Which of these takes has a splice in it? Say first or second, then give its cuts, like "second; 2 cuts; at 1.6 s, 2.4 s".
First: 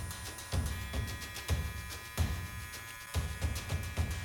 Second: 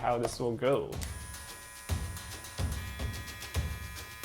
second; 1 cut; at 1.0 s